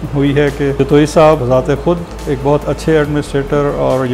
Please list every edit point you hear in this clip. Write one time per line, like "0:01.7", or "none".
none